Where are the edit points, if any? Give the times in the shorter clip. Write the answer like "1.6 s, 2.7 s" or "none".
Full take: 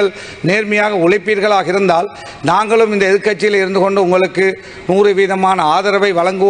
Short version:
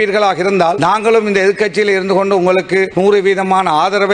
0.8 s, 2.9 s